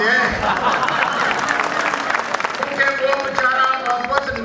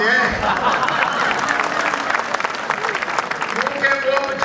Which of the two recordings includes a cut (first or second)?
first